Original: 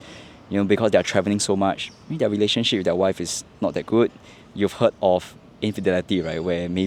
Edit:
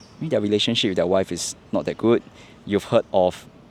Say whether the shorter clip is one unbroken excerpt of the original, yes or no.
yes